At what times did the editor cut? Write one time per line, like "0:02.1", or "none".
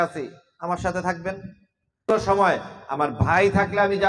0:02.1